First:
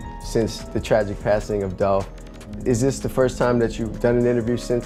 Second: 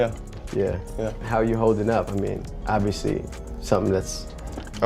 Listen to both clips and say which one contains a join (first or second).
second